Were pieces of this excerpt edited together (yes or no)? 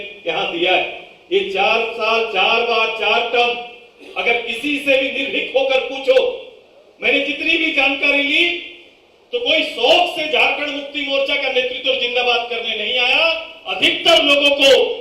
no